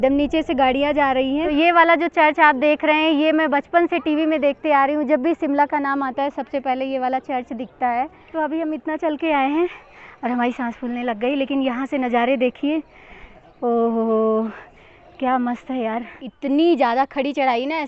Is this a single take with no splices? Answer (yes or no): no